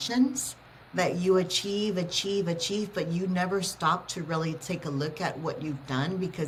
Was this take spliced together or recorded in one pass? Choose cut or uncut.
uncut